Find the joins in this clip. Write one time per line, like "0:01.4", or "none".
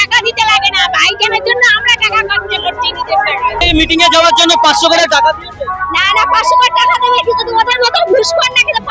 0:03.6

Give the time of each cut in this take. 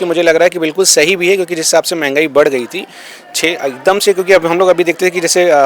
none

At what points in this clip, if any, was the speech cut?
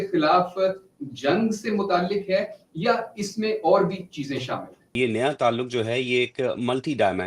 0:04.9

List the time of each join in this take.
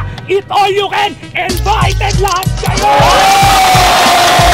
none

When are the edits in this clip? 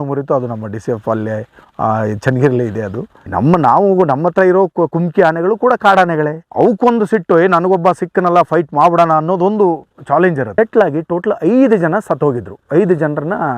0:03.2
0:10.5

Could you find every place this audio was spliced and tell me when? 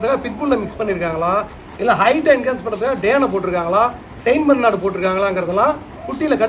none

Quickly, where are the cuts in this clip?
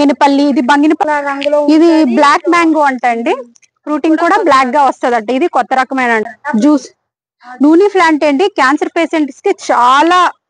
0:01.0
0:06.3

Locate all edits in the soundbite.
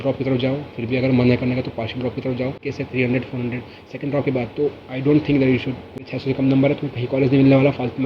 0:02.7
0:06.1

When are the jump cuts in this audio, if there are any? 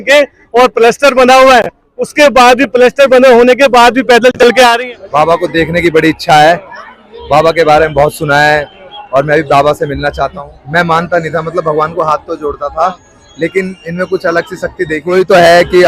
0:04.8
0:10.5
0:15.1

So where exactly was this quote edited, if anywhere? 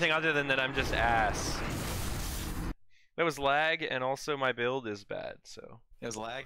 0:02.8

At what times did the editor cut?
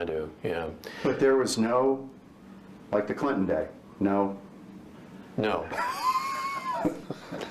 0:06.1

